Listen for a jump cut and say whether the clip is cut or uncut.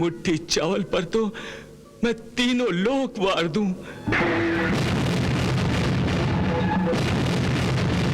uncut